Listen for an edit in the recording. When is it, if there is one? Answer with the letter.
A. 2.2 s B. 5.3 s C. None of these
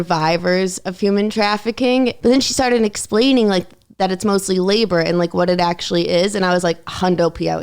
A